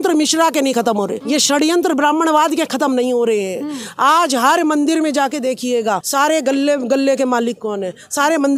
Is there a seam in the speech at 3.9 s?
no; 2 cuts; at 1.2 s, 6.1 s

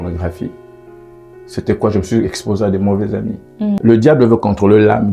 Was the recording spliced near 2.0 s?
no; 1 cut; at 3.8 s

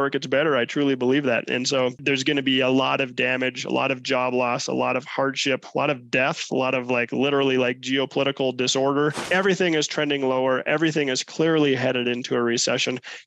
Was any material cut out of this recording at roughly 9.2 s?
yes; 2 cuts; at 2.0 s, 9.2 s

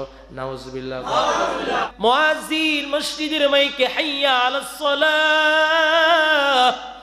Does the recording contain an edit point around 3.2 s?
no; 1 cut; at 1.9 s

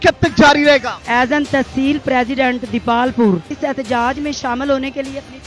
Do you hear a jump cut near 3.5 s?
yes; 2 cuts; at 1.0 s, 3.5 s

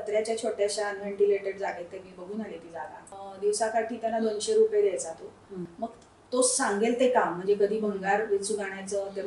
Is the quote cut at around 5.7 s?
yes; 2 cuts; at 3.1 s, 5.7 s

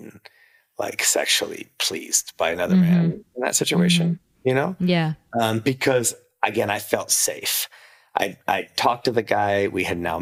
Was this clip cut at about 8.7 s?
no; 0 cuts

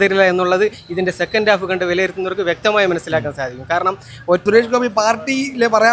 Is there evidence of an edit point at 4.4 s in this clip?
yes; 1 cut; at 4.4 s

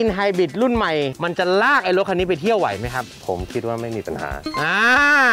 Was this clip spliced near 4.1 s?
no; 1 cut; at 1.1 s

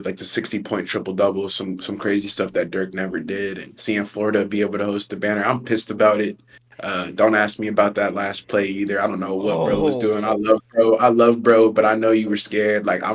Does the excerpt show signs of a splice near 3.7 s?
yes; 1 cut; at 3.7 s

